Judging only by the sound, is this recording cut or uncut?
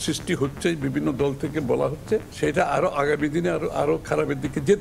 cut